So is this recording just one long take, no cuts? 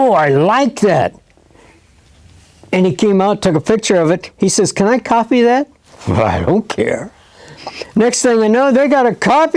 yes; 0 cuts

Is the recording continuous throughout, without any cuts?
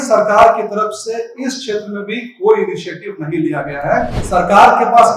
no; 1 cut; at 4.2 s

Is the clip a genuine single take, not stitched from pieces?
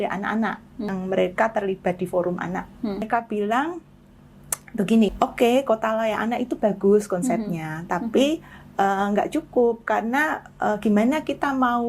no; 3 cuts; at 0.9 s, 3.1 s, 5.1 s

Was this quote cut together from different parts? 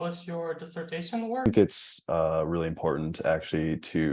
yes; 1 cut; at 1.5 s

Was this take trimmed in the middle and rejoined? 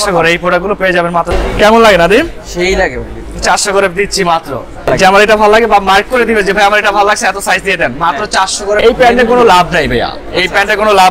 yes; 3 cuts; at 1.3 s, 4.9 s, 8.8 s

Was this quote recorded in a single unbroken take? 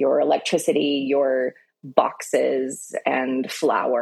yes; 0 cuts

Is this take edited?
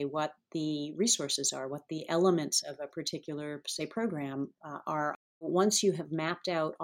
yes; 1 cut; at 5.4 s

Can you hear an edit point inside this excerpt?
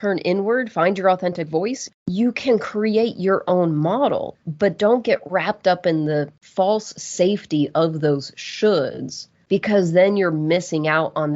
yes; 2 cuts; at 1.8 s, 4.3 s

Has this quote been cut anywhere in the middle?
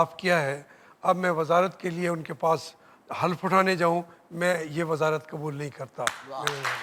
no; 0 cuts

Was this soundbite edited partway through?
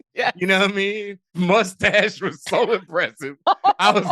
yes; 1 cut; at 1.3 s

